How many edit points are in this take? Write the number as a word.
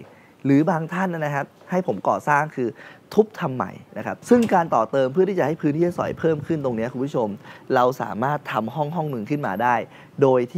one